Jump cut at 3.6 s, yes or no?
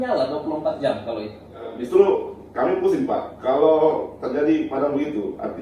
no